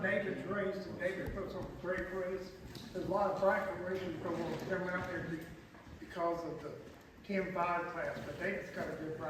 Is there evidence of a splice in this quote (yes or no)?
no